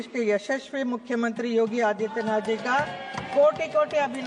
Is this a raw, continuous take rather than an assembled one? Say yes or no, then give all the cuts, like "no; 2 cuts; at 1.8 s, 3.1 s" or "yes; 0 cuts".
yes; 0 cuts